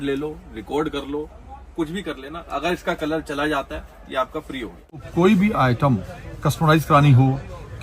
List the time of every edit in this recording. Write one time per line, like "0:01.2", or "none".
0:05.1